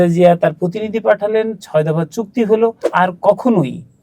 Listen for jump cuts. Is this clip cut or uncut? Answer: cut